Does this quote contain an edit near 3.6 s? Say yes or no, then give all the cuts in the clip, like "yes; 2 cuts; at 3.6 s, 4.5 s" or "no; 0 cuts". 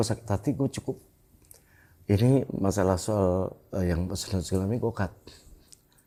no; 0 cuts